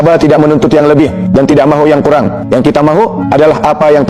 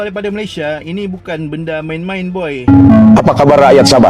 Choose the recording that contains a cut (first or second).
second